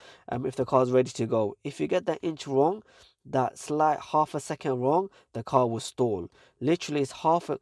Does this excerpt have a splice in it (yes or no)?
no